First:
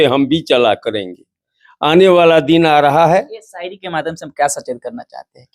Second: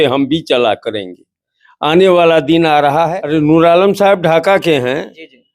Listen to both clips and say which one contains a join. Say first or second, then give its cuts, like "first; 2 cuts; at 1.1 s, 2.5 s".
second; 1 cut; at 3.2 s